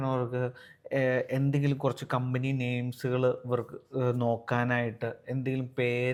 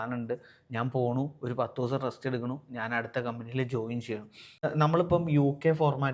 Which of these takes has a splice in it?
second; 1 cut; at 4.6 s

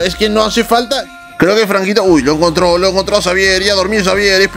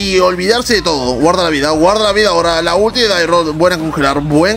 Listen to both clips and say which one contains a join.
first; 1 cut; at 1.0 s

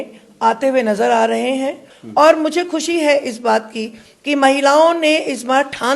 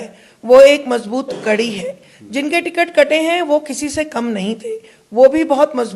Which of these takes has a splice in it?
first; 1 cut; at 1.9 s

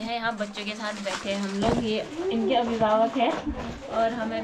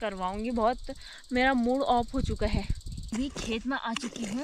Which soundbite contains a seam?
second; 1 cut; at 3.1 s

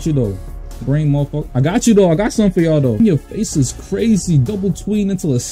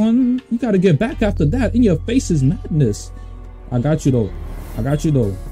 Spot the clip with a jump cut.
first; 2 cuts; at 1.5 s, 3.0 s

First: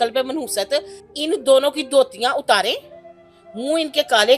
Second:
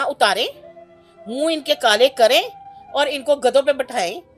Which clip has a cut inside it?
first; 1 cut; at 1.0 s

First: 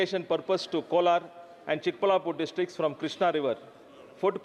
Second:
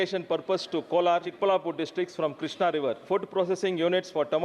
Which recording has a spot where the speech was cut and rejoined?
second; 2 cuts; at 1.3 s, 3.0 s

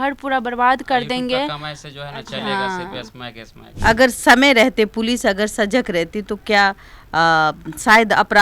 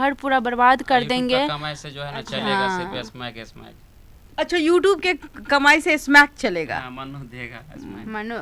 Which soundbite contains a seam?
first; 1 cut; at 3.6 s

